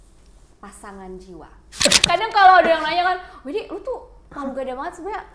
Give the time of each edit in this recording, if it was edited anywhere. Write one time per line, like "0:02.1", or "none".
0:01.8